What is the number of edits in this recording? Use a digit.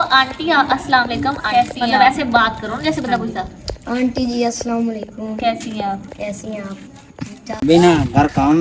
1